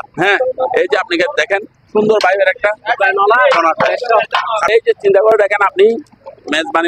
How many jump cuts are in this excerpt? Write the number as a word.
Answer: one